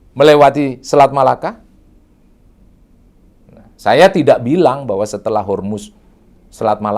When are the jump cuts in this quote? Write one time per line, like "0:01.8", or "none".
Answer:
none